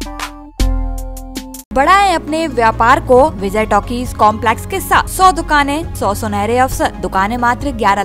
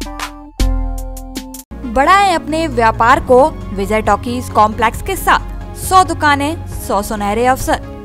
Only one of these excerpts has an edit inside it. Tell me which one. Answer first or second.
first